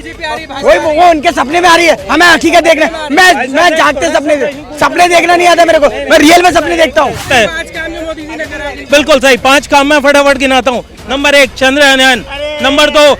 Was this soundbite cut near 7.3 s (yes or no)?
yes